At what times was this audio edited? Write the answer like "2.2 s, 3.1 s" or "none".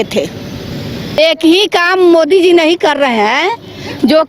1.2 s